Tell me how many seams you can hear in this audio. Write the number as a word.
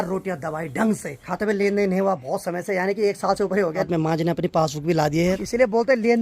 three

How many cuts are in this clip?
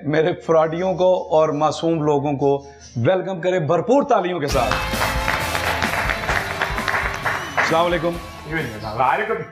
zero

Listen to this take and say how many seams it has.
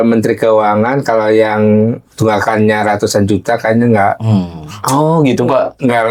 zero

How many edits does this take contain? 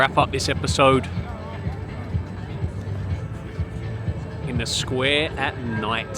zero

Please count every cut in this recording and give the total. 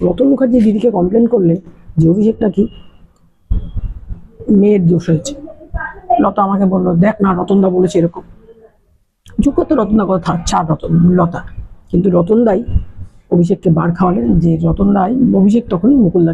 zero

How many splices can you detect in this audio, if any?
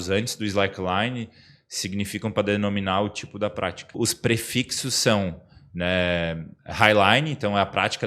one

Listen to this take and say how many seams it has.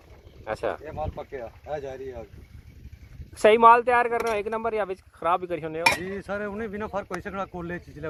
zero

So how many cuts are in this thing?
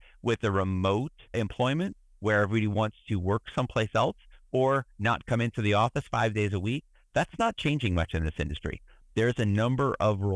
one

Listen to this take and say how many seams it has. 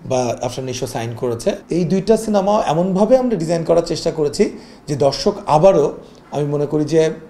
one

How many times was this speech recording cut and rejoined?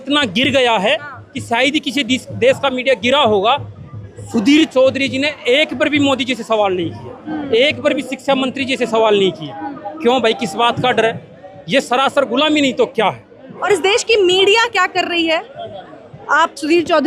one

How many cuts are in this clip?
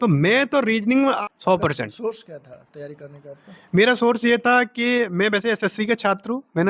one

